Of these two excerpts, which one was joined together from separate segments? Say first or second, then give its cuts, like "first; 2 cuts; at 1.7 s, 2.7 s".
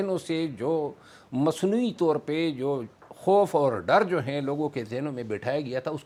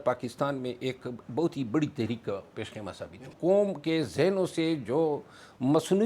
second; 1 cut; at 3.3 s